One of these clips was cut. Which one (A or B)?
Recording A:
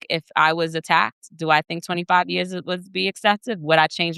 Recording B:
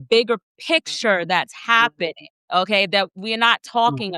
B